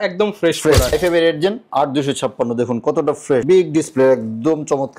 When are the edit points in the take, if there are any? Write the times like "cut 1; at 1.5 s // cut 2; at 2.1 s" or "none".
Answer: cut 1; at 0.9 s // cut 2; at 3.4 s